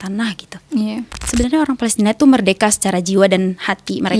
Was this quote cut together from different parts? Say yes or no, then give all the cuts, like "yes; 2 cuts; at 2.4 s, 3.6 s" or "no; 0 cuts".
yes; 1 cut; at 1.2 s